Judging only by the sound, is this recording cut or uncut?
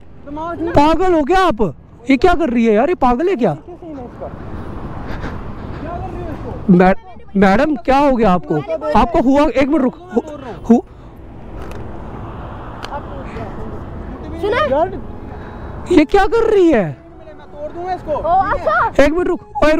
uncut